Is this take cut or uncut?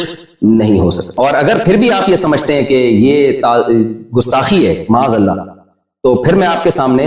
cut